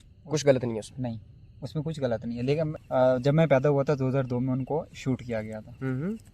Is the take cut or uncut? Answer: cut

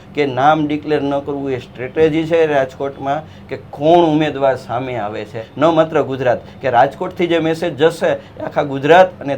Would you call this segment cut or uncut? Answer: cut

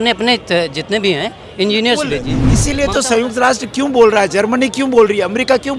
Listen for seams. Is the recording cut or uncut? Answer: cut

